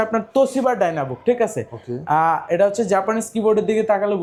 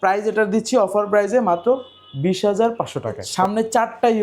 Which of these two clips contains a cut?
second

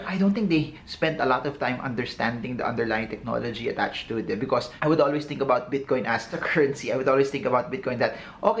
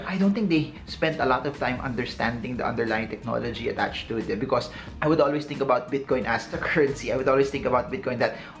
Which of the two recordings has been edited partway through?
first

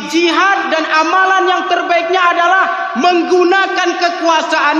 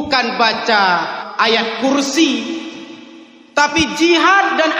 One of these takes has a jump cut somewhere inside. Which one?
second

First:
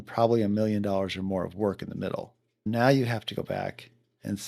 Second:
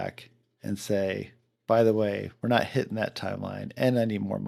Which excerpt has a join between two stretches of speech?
first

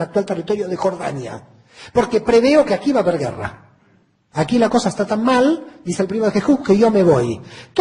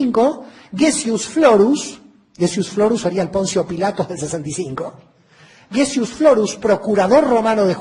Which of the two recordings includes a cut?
first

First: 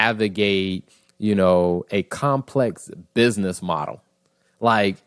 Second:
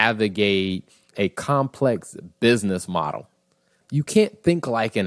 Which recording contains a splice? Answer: second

